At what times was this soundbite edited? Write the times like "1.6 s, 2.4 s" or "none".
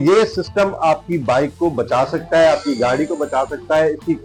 none